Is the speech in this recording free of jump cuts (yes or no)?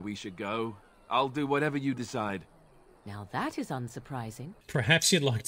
no